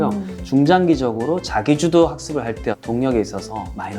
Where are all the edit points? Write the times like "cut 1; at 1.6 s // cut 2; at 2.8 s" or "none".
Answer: cut 1; at 2.8 s

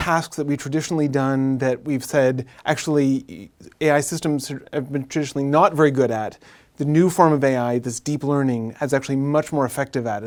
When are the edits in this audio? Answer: none

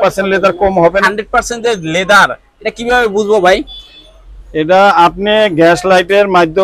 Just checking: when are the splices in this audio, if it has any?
cut 1; at 1.0 s

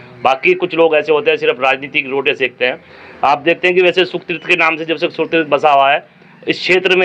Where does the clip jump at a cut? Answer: none

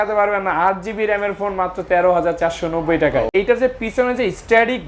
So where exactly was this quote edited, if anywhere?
cut 1; at 3.3 s

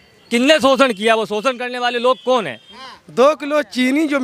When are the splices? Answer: cut 1; at 2.7 s

